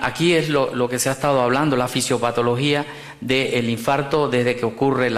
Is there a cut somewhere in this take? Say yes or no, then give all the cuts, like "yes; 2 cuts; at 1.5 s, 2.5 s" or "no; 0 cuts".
no; 0 cuts